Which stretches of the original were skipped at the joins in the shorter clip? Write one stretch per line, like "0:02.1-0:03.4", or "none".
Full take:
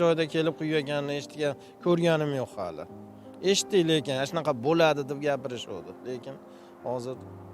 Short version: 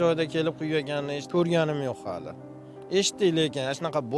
0:01.2-0:01.7